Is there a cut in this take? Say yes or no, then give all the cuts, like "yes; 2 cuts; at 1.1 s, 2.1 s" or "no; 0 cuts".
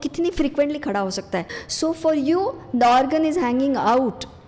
yes; 1 cut; at 1.5 s